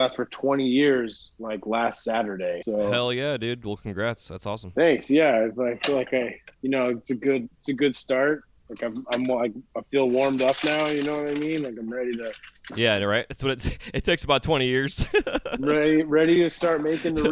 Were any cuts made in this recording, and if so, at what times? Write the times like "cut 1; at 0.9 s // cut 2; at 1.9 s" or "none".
cut 1; at 2.6 s